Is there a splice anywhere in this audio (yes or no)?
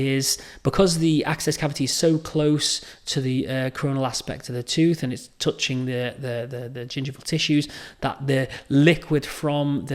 no